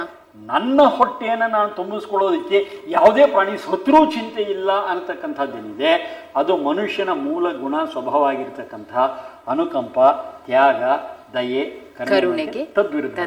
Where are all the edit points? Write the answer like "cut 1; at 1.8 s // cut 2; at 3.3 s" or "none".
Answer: none